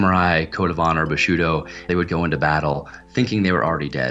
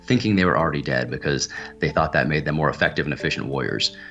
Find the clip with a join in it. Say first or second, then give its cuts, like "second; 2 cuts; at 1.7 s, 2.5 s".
first; 1 cut; at 1.9 s